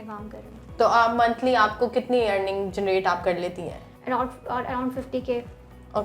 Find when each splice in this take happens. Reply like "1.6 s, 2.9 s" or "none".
3.8 s